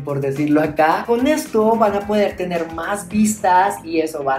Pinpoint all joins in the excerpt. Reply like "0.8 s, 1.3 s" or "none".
1.0 s